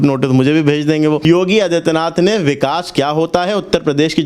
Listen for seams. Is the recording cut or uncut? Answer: cut